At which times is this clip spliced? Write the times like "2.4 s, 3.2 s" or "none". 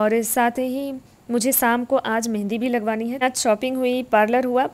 3.2 s